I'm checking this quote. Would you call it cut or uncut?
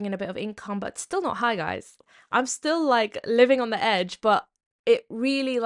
uncut